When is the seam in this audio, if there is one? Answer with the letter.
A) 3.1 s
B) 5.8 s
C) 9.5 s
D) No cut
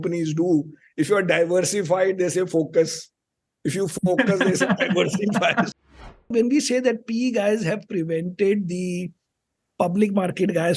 B